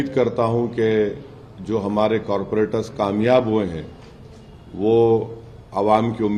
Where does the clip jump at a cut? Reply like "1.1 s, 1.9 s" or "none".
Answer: none